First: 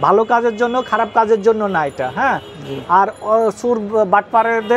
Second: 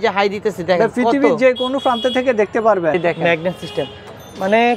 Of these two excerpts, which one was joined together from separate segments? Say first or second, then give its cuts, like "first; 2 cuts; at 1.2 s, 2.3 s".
second; 1 cut; at 3.0 s